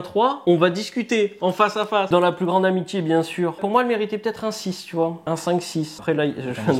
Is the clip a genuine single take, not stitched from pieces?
yes; 0 cuts

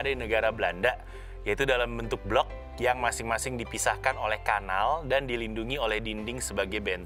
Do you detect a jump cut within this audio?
no; 0 cuts

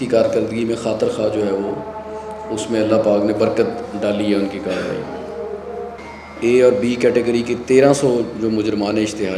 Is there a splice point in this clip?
yes; 1 cut; at 6.0 s

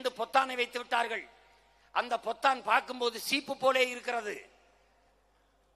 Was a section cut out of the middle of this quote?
no; 0 cuts

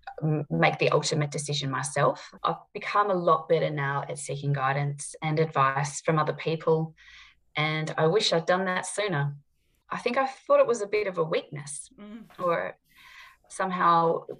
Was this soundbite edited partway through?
yes; 2 cuts; at 2.3 s, 9.7 s

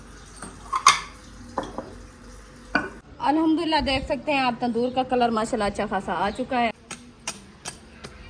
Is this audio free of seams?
no; 2 cuts; at 3.0 s, 6.7 s

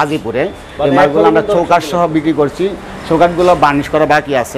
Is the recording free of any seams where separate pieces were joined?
yes; 0 cuts

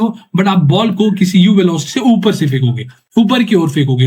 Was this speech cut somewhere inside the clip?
no; 0 cuts

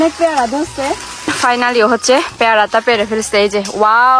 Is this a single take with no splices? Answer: no; 1 cut; at 1.5 s

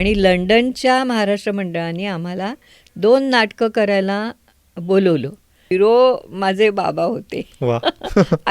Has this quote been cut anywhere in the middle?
yes; 1 cut; at 5.6 s

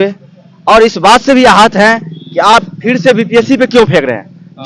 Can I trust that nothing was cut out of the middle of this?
yes; 0 cuts

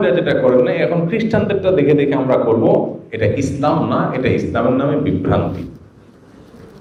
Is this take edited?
no; 0 cuts

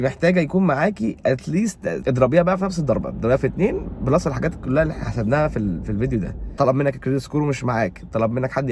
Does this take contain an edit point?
yes; 2 cuts; at 2.0 s, 6.4 s

